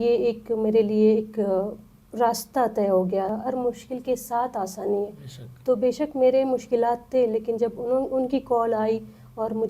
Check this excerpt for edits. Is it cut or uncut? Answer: cut